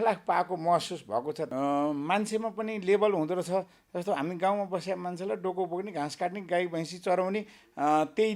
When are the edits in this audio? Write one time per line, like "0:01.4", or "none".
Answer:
0:01.4